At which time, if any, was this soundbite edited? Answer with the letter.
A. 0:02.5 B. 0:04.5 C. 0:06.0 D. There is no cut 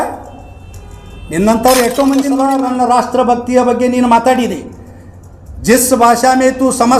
A